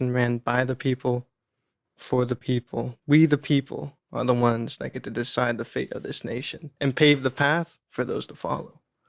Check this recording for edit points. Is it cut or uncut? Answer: cut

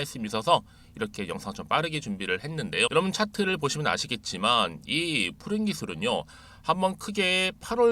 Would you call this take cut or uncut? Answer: cut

